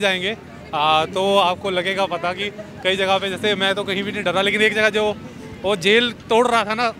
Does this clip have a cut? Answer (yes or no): no